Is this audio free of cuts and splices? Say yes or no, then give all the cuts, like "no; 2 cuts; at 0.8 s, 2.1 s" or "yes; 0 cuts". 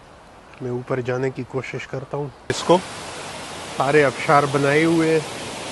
no; 1 cut; at 2.5 s